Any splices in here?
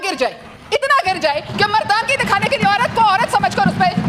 no; 0 cuts

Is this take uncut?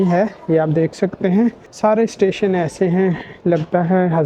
no; 1 cut; at 1.7 s

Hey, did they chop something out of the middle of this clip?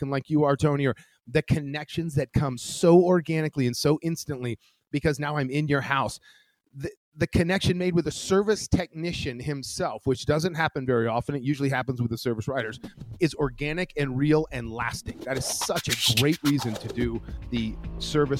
yes; 1 cut; at 17.3 s

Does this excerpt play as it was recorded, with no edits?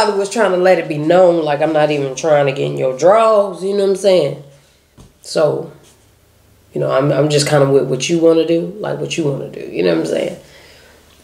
yes; 0 cuts

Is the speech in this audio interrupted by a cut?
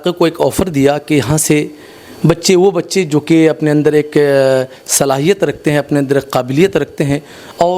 no; 0 cuts

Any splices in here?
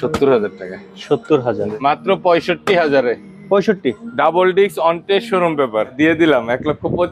yes; 2 cuts; at 1.6 s, 5.9 s

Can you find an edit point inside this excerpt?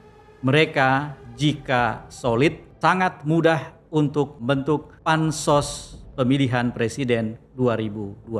yes; 2 cuts; at 2.7 s, 4.4 s

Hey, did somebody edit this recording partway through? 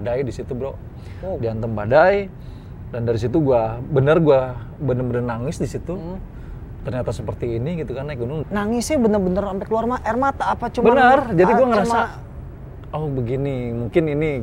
yes; 1 cut; at 8.3 s

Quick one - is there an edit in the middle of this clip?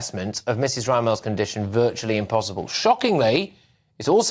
no; 0 cuts

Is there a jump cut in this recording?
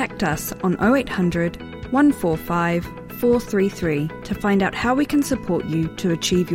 no; 0 cuts

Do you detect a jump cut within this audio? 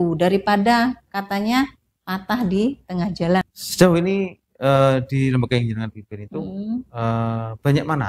yes; 1 cut; at 3.4 s

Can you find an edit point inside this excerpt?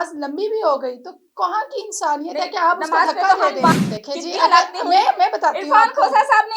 yes; 1 cut; at 3.7 s

